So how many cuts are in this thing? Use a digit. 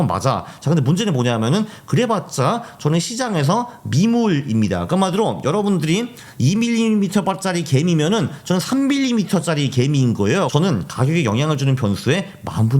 1